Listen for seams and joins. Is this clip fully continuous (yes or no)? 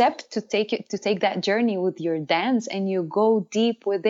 yes